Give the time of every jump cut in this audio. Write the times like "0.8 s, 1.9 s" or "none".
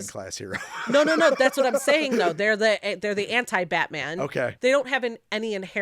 4.5 s